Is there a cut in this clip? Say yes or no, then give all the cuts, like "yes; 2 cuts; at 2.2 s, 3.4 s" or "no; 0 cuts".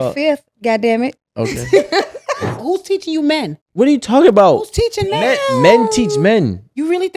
yes; 2 cuts; at 2.6 s, 3.6 s